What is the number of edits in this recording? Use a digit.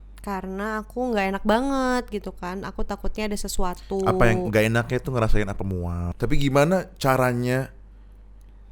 1